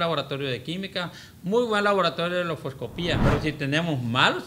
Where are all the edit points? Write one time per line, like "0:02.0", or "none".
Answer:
0:03.2